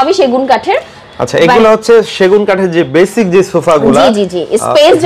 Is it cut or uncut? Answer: uncut